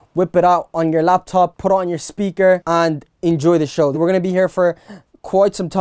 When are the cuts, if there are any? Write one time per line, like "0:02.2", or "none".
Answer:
0:01.6
0:02.6
0:04.0